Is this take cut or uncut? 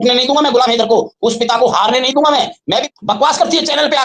cut